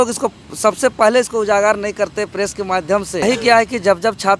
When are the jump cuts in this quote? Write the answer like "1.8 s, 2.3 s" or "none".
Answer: 3.2 s